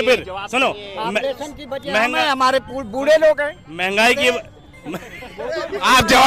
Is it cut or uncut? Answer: uncut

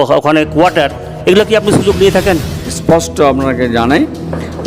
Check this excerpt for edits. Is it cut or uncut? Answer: cut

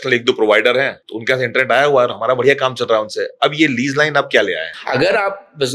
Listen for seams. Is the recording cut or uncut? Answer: cut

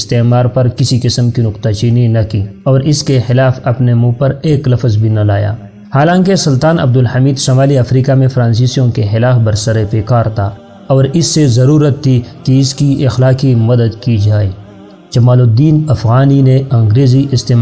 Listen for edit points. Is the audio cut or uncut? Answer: uncut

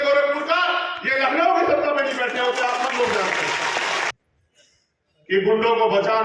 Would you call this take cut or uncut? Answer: cut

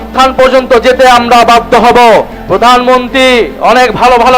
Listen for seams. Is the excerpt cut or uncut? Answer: cut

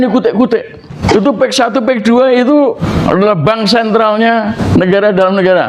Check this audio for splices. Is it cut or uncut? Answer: cut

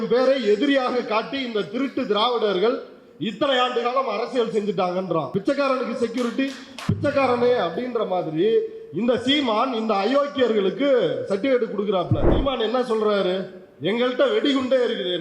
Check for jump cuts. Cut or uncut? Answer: cut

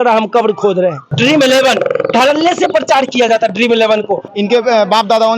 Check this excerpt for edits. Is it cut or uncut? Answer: cut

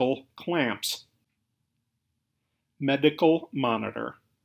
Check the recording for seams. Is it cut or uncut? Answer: cut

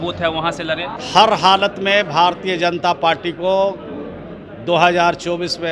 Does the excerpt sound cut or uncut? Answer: cut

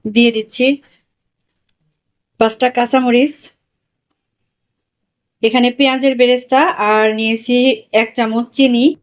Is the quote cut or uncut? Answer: uncut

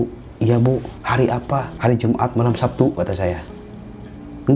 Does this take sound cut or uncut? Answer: cut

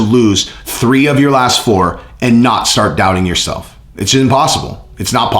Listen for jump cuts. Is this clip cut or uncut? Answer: uncut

